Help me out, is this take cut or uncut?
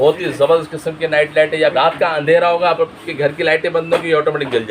cut